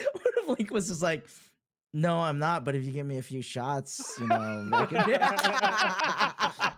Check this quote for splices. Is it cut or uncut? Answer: uncut